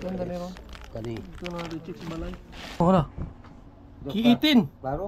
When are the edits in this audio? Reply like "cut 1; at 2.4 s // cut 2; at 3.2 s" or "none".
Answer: cut 1; at 2.8 s